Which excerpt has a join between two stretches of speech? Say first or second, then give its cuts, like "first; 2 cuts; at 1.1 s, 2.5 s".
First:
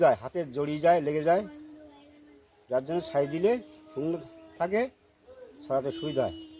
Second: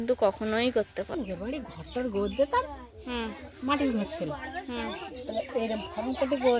second; 1 cut; at 1.1 s